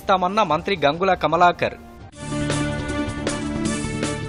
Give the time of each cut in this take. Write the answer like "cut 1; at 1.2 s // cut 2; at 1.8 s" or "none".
none